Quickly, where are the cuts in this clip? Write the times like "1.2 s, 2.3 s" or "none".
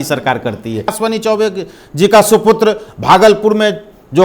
0.9 s